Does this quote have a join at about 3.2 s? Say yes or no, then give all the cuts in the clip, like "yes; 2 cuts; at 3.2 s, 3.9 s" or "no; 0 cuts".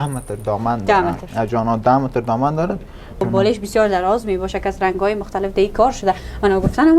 yes; 1 cut; at 3.2 s